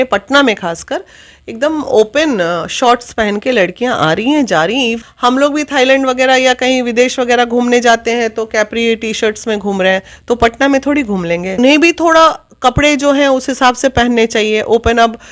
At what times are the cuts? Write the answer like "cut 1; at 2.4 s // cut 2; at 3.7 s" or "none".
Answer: cut 1; at 5.1 s // cut 2; at 11.6 s